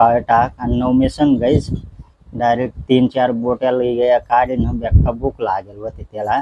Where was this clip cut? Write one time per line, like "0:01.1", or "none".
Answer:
none